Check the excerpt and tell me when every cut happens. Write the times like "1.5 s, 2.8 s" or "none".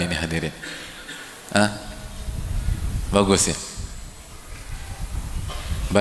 none